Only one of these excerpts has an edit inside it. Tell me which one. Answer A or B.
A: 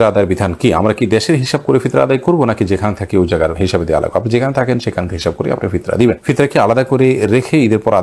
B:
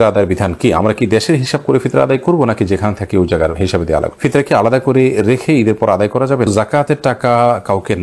B